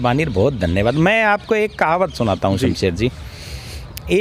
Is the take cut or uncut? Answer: uncut